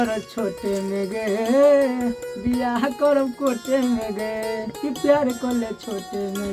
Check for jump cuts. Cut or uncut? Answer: uncut